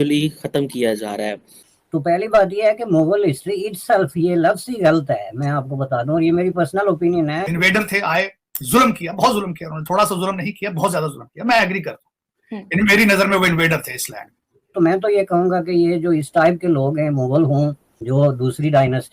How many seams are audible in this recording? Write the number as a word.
three